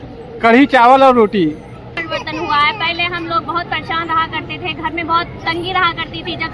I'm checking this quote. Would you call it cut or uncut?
cut